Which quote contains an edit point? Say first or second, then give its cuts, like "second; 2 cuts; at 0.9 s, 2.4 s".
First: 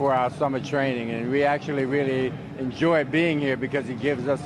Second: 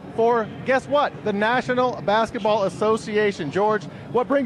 first; 1 cut; at 2.8 s